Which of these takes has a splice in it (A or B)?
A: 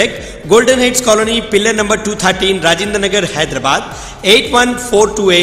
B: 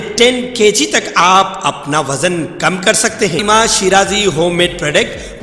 B